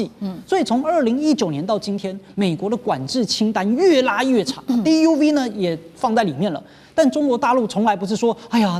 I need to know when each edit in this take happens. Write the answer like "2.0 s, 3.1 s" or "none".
none